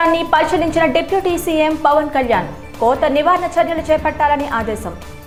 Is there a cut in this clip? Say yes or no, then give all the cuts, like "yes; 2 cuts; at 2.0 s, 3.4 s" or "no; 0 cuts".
no; 0 cuts